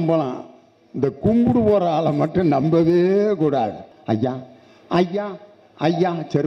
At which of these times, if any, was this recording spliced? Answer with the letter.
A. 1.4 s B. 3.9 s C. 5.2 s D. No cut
B